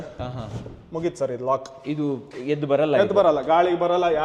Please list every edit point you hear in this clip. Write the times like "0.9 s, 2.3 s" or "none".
none